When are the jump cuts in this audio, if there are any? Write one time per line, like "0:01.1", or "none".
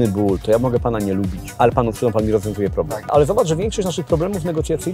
0:01.4
0:03.1